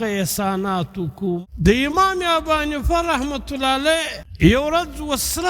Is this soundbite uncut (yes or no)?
no